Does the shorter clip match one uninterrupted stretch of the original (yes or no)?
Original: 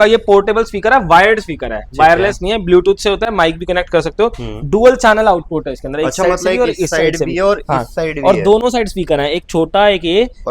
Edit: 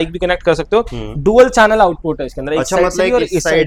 yes